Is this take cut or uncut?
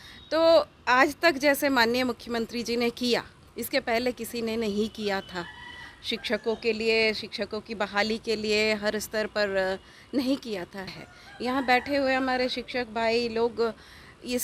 cut